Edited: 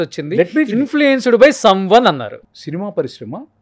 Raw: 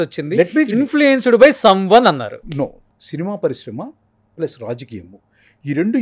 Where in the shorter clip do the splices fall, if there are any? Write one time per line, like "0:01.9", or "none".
0:02.4